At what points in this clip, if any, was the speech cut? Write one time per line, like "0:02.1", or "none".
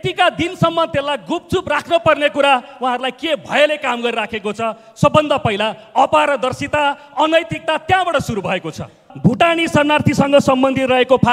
0:09.1

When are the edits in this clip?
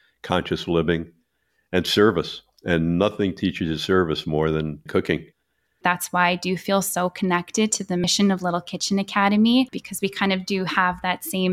0:05.8

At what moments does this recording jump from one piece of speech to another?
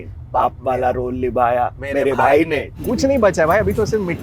0:02.7

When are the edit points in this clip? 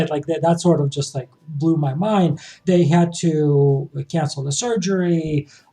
0:02.5

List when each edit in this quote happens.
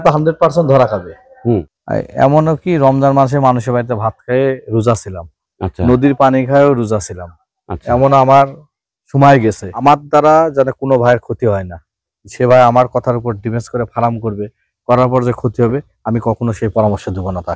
0:01.8
0:09.8

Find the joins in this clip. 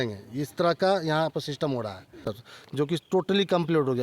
0:02.3

